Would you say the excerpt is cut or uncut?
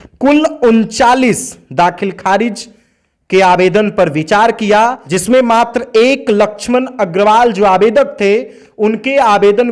cut